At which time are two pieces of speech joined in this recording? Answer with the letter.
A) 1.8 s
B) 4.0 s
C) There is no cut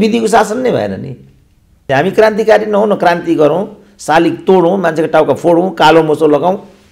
A